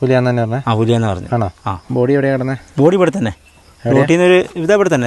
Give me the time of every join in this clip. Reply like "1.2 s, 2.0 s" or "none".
1.8 s